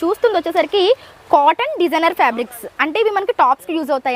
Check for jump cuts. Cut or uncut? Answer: uncut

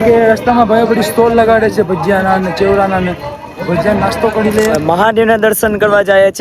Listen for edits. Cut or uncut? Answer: cut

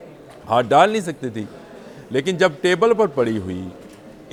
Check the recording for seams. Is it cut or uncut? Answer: uncut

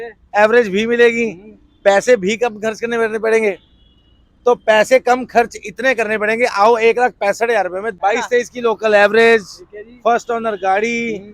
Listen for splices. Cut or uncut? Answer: cut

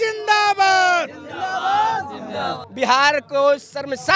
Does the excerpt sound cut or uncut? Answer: cut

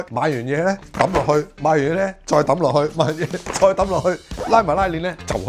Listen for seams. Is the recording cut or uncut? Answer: uncut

